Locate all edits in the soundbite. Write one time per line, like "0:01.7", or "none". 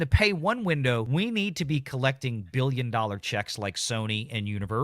0:01.1